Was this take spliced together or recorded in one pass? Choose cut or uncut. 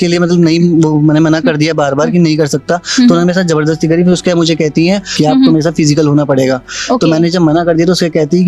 uncut